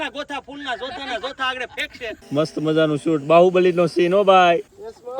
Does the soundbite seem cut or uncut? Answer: cut